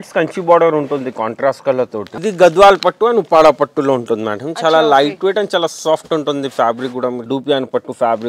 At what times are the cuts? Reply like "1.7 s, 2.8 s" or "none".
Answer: 2.1 s, 7.2 s